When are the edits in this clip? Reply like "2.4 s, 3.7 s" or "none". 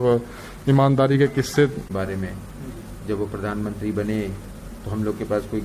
1.9 s